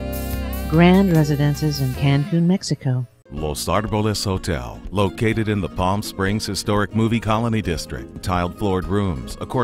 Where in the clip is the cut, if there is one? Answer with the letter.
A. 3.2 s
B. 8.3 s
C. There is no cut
A